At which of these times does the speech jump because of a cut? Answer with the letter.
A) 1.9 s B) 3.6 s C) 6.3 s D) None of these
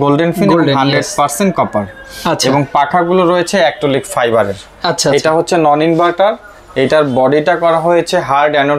D